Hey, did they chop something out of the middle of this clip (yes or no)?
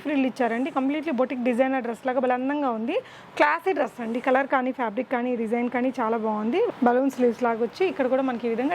yes